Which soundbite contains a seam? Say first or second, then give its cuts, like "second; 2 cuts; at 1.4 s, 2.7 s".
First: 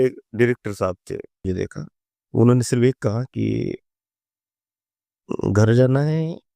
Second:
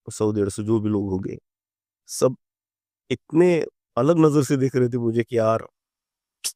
first; 1 cut; at 1.4 s